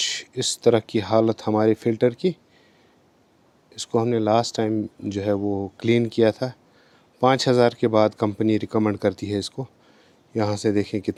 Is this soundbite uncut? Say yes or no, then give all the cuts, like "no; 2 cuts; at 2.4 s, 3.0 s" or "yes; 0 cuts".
yes; 0 cuts